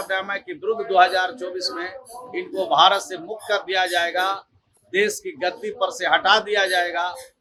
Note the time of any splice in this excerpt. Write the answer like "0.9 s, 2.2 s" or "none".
none